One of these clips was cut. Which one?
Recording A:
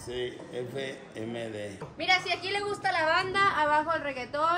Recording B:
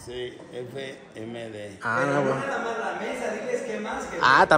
A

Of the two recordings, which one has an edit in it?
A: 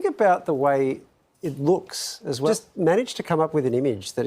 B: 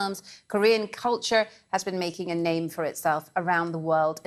A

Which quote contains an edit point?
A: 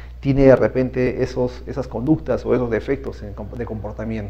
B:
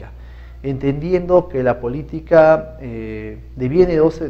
B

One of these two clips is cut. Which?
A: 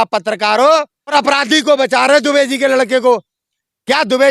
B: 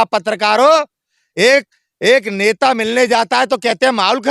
A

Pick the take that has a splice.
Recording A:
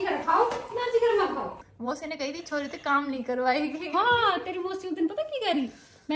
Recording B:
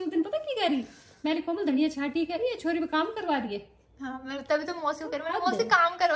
A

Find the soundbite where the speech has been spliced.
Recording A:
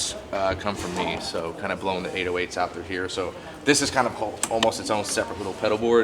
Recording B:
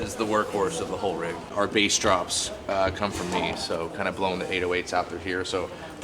B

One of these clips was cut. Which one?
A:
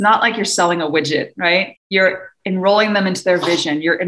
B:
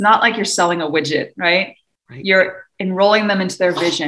A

